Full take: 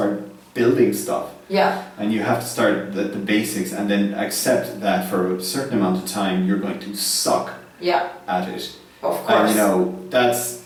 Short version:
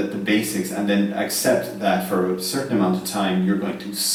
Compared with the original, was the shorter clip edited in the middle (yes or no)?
no